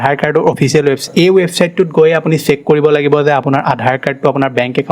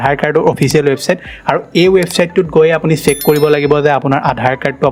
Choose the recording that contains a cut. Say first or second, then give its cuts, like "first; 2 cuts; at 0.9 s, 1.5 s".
first; 1 cut; at 1.0 s